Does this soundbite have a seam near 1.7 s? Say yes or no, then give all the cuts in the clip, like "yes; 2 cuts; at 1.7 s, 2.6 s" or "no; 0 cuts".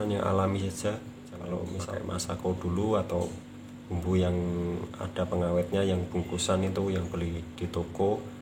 yes; 1 cut; at 1.7 s